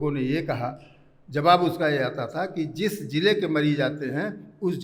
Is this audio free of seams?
yes; 0 cuts

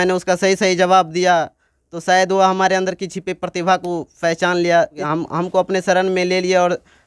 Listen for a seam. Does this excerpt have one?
yes; 1 cut; at 5.0 s

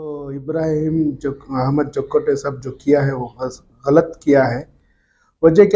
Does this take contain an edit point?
no; 0 cuts

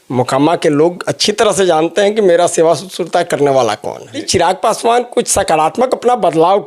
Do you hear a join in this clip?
yes; 1 cut; at 4.3 s

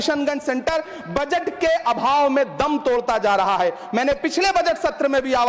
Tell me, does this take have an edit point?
no; 0 cuts

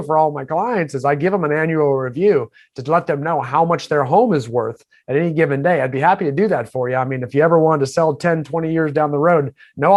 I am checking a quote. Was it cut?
no; 0 cuts

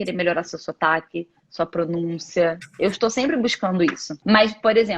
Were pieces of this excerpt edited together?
yes; 1 cut; at 4.1 s

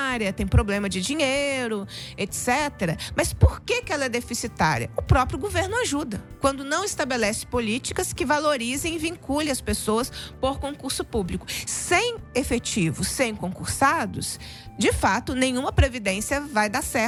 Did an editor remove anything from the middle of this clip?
no; 0 cuts

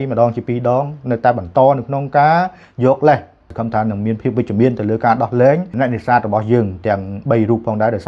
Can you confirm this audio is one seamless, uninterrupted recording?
no; 2 cuts; at 3.6 s, 5.7 s

